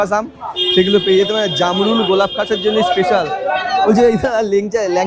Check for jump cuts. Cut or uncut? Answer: uncut